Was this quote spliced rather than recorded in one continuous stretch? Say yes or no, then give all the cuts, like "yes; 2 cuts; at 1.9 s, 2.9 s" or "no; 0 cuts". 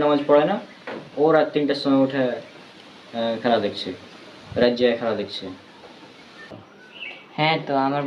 no; 0 cuts